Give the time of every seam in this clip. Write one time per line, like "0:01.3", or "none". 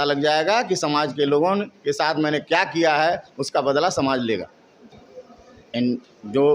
0:05.0